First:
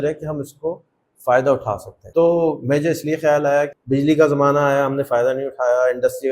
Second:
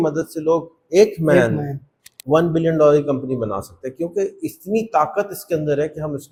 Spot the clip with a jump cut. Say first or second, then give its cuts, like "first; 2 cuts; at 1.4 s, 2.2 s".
first; 2 cuts; at 1.9 s, 3.7 s